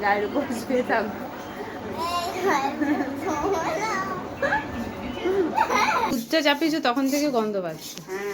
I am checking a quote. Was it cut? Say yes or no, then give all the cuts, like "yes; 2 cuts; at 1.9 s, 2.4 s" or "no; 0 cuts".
yes; 1 cut; at 6.1 s